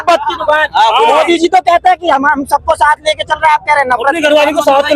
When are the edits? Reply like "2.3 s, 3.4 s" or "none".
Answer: none